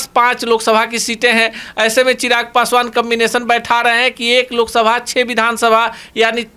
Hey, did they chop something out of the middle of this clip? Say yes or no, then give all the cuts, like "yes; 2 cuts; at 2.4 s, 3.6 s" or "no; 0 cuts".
no; 0 cuts